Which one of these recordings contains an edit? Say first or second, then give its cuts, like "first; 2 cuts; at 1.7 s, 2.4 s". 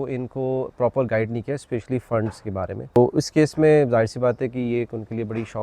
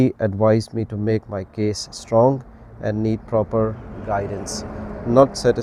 first; 1 cut; at 3.0 s